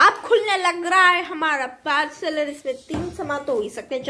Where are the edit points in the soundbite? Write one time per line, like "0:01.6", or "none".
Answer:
none